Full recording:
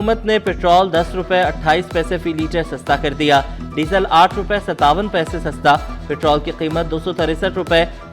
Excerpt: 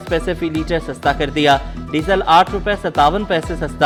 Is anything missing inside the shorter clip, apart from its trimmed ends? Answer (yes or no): no